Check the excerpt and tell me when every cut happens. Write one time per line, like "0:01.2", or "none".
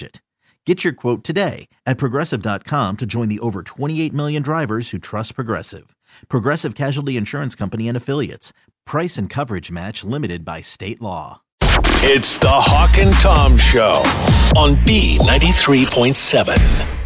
0:11.5